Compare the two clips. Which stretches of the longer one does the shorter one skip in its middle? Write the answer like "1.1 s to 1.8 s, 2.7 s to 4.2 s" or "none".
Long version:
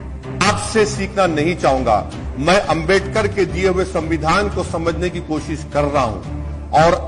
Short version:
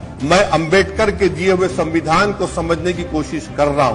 none